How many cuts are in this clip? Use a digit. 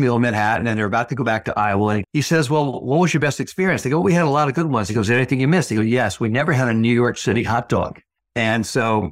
1